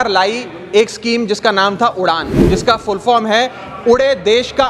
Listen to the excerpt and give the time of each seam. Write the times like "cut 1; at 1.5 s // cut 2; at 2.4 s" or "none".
cut 1; at 2.3 s